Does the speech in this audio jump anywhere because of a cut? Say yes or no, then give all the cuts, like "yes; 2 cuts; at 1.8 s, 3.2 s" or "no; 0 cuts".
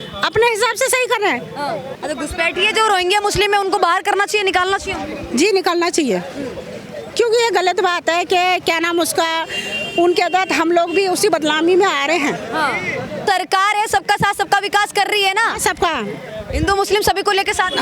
yes; 2 cuts; at 2.0 s, 13.2 s